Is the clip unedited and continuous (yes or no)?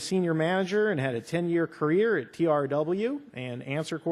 yes